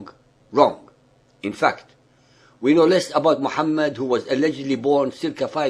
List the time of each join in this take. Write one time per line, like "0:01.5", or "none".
0:03.4

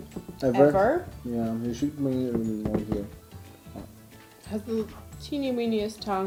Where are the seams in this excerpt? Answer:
none

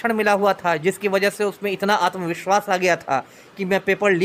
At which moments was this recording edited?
none

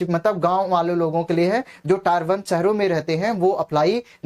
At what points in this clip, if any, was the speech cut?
none

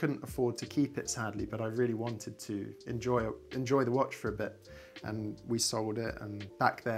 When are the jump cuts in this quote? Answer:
none

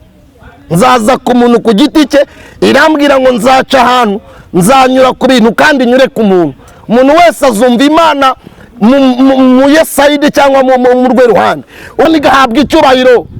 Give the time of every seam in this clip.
0:12.1

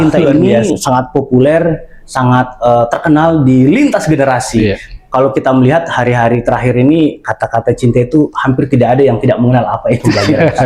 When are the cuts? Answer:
none

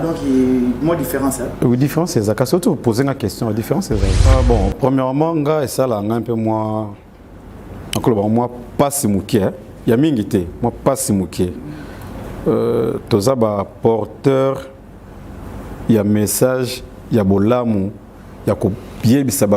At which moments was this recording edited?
0:04.2

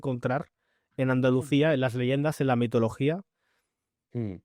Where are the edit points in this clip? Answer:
none

